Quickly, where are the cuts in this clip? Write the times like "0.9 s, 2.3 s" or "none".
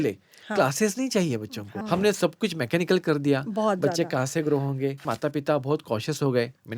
1.8 s, 5.0 s